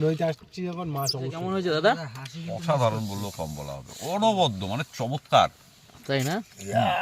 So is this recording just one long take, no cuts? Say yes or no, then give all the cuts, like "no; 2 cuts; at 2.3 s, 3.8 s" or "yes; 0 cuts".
no; 1 cut; at 1.4 s